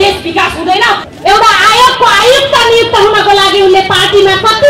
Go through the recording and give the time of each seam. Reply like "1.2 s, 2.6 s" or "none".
1.1 s